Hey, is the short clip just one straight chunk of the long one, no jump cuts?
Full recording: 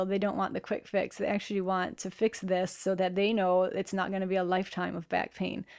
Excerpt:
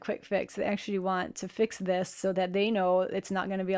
yes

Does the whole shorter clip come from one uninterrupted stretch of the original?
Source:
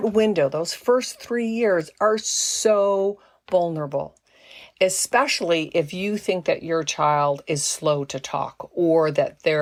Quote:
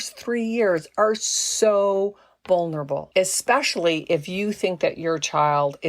no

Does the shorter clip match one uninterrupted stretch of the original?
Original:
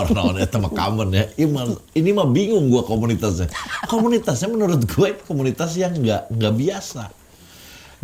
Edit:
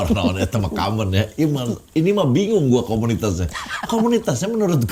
yes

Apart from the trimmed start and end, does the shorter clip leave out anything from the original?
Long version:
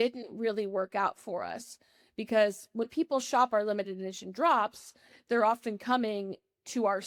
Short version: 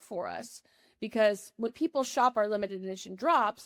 no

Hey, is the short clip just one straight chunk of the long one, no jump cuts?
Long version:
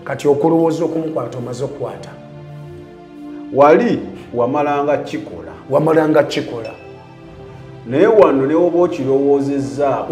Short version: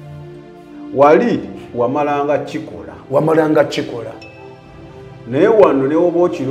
no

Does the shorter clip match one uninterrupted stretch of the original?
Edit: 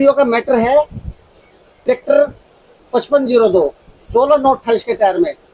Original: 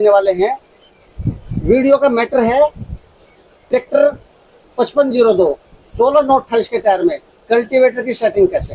yes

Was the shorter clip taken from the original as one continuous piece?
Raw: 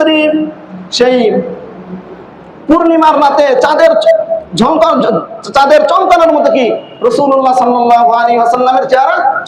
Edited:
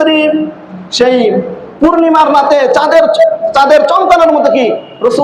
no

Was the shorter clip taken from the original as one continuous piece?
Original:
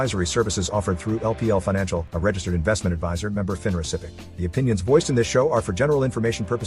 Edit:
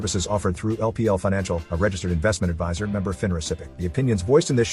no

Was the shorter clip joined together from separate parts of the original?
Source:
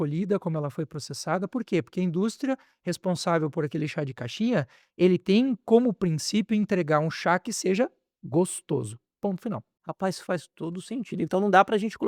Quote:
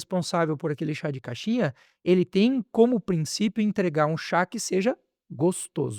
no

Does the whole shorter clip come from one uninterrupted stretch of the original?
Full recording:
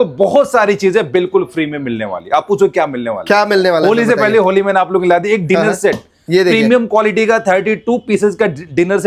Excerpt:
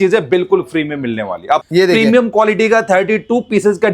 no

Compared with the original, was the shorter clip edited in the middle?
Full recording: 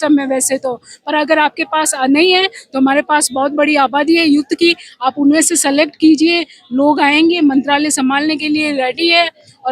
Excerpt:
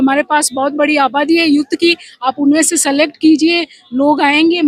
no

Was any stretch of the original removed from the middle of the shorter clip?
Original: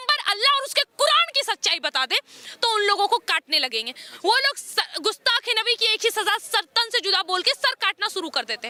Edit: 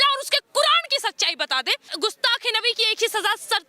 yes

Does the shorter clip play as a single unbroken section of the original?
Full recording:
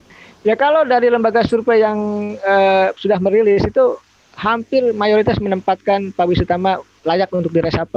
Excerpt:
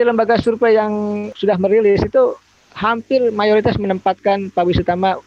no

